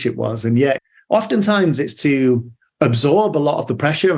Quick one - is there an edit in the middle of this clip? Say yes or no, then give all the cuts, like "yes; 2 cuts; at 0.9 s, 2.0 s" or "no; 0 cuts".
no; 0 cuts